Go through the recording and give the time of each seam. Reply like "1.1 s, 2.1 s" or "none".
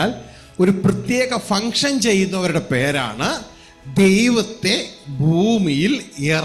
none

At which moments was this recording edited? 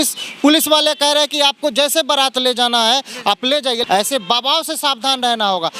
3.8 s

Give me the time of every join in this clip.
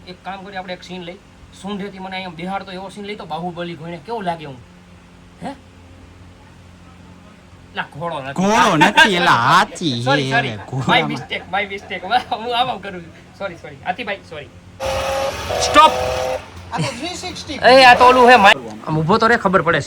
14.8 s, 18.6 s

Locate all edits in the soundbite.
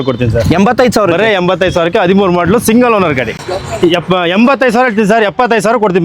3.3 s

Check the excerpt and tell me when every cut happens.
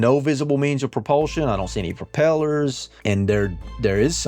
2.9 s

